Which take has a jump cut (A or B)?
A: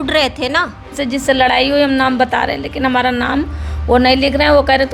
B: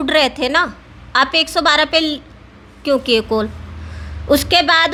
A